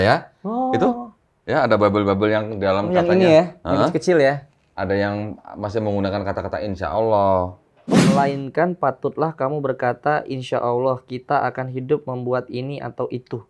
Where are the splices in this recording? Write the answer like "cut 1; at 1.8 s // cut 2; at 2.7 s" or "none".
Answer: cut 1; at 8.0 s

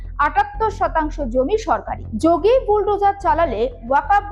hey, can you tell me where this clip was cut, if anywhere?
cut 1; at 2.0 s

